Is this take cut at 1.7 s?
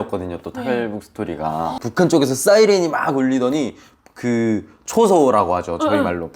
yes; 1 cut; at 1.7 s

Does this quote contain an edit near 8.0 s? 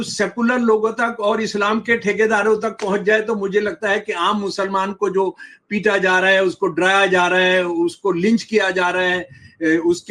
no; 0 cuts

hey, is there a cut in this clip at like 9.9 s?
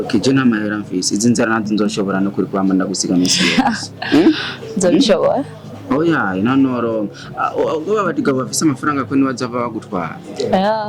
no; 0 cuts

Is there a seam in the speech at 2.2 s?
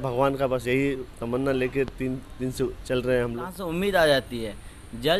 no; 1 cut; at 3.5 s

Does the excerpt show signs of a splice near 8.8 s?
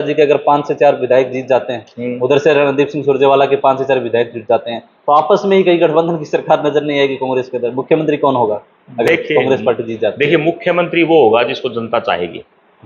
no; 0 cuts

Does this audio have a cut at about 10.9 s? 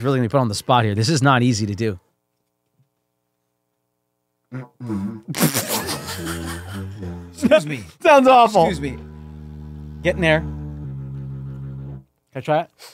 yes; 1 cut; at 10.9 s

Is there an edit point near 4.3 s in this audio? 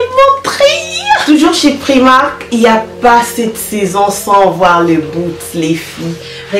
no; 1 cut; at 1.2 s

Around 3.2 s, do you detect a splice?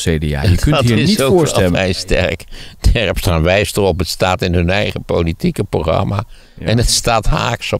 no; 1 cut; at 1.7 s

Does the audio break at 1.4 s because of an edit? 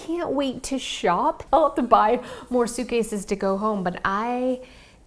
yes; 1 cut; at 1.4 s

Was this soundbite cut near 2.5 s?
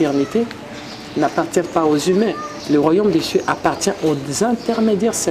yes; 1 cut; at 2.5 s

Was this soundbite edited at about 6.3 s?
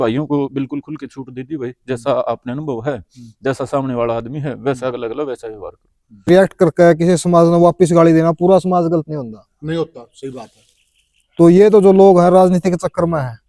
yes; 1 cut; at 6.3 s

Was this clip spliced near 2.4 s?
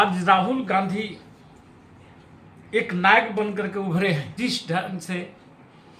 no; 1 cut; at 4.3 s

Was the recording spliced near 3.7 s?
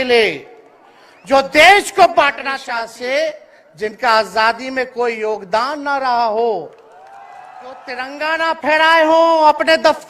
no; 2 cuts; at 2.5 s, 8.0 s

